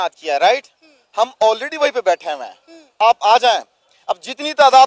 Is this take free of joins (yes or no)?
yes